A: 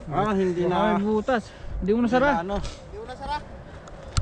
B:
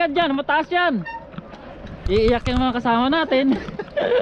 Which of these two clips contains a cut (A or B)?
B